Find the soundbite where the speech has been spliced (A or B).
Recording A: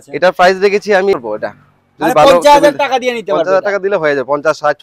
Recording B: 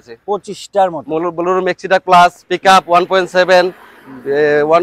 A